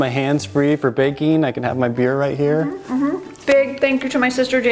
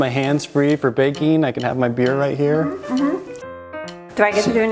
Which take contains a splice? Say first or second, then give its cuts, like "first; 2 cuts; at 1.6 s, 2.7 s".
second; 1 cut; at 3.5 s